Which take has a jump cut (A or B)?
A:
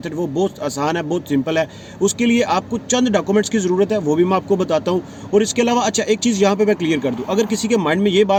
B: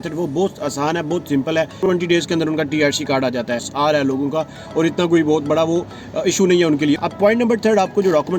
B